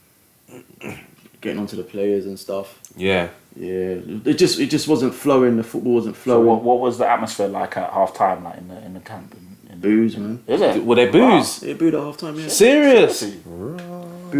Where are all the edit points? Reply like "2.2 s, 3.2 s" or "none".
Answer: none